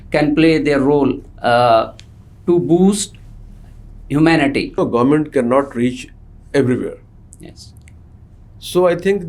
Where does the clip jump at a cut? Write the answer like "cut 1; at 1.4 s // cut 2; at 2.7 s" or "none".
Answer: cut 1; at 4.8 s